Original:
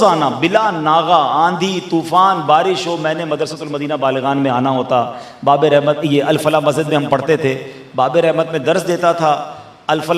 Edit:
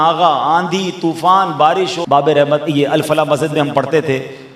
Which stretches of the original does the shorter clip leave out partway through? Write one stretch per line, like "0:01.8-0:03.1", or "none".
0:02.9-0:05.3